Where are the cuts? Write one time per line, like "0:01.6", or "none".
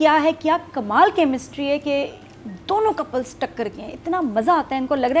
none